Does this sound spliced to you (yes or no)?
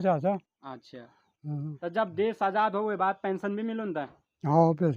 yes